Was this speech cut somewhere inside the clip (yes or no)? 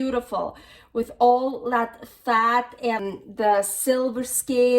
yes